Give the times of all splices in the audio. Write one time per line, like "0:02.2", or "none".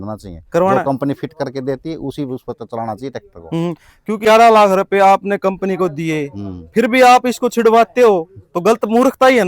0:04.2